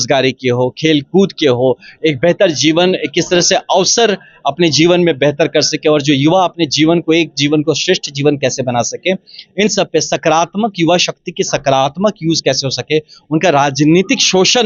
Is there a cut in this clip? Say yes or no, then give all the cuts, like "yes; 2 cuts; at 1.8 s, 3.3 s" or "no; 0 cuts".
no; 0 cuts